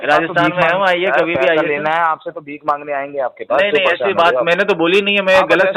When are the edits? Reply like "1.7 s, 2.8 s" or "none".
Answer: none